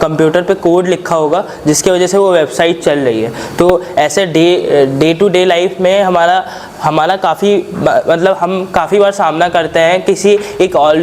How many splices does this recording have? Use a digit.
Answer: 0